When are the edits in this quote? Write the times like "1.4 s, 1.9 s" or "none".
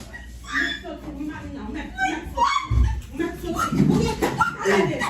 3.9 s